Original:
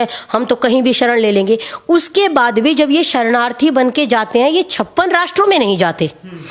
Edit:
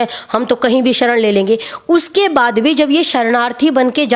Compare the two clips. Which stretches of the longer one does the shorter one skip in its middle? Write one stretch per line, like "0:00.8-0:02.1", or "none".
none